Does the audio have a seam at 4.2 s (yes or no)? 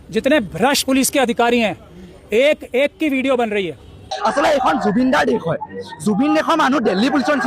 yes